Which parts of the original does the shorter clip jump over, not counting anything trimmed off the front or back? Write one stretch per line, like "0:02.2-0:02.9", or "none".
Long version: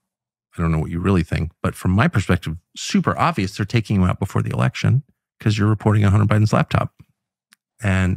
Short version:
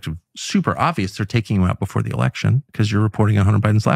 0:05.1-0:05.3